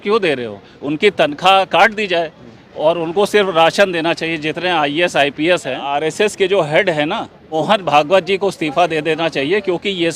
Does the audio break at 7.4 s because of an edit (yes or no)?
yes